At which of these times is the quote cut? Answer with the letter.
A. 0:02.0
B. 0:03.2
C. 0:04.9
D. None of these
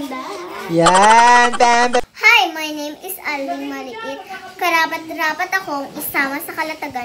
A